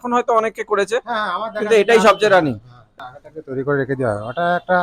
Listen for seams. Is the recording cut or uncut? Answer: cut